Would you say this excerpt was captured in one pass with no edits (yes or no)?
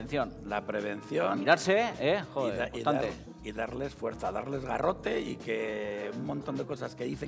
yes